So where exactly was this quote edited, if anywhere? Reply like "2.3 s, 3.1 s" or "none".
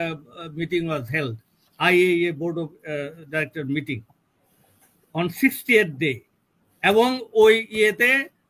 none